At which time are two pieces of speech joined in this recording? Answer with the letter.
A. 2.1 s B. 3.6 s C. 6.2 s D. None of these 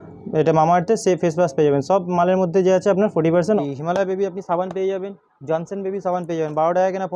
B